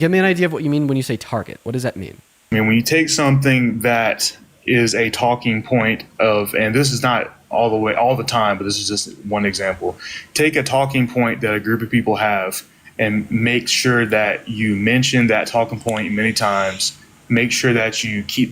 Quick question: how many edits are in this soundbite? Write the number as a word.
one